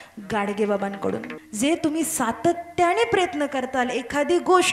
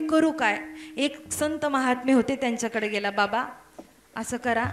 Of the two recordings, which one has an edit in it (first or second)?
first